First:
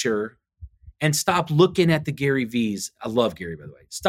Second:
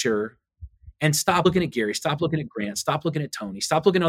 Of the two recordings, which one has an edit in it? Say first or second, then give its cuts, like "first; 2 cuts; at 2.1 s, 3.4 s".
second; 1 cut; at 1.5 s